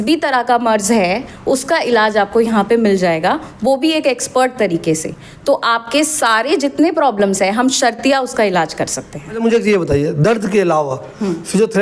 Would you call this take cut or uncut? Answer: uncut